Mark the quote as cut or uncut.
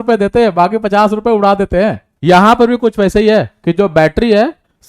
cut